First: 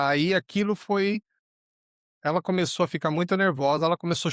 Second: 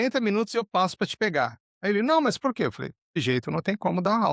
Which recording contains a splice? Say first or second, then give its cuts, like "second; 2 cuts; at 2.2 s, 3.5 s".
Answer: second; 2 cuts; at 1.7 s, 3.0 s